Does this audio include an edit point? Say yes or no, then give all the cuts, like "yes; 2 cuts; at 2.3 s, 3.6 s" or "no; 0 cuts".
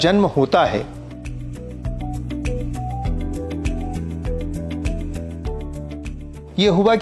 no; 0 cuts